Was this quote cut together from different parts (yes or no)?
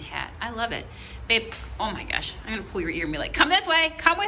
no